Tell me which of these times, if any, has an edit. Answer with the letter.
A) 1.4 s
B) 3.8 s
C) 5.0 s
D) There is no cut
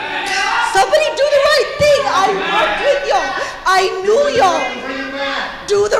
D